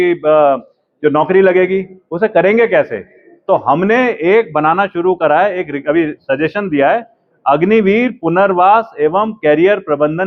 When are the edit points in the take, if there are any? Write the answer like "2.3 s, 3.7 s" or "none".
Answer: none